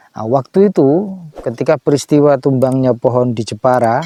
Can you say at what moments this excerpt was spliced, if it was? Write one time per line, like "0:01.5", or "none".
none